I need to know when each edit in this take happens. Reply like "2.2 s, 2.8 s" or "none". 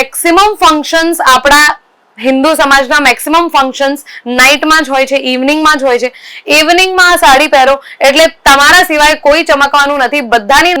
none